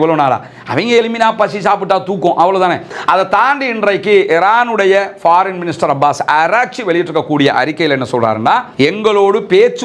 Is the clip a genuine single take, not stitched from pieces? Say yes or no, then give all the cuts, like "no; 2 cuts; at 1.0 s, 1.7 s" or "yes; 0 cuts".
no; 1 cut; at 2.9 s